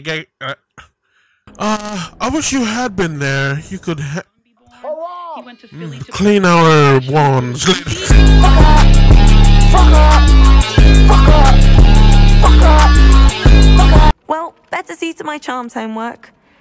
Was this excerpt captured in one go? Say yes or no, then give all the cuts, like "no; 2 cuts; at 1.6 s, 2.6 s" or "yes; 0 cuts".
no; 1 cut; at 14.2 s